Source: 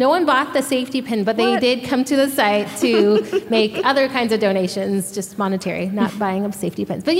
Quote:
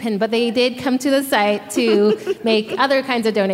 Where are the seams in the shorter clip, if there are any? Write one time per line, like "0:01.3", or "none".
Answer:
none